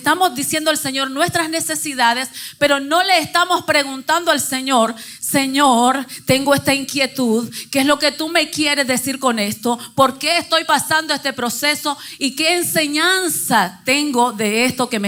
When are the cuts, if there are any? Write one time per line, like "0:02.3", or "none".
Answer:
none